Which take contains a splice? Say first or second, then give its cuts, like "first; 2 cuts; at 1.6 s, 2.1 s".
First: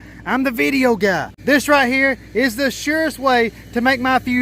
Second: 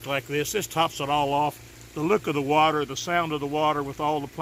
first; 1 cut; at 1.3 s